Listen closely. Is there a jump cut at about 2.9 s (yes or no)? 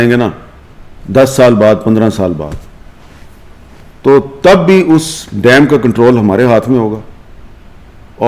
no